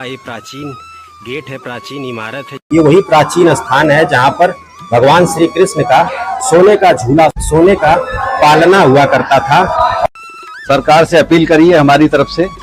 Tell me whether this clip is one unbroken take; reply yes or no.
no